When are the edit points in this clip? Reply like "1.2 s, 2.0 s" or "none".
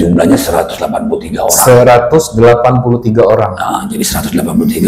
none